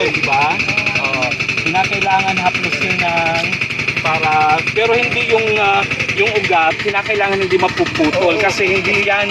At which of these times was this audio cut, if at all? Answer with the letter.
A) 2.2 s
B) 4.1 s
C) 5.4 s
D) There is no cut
D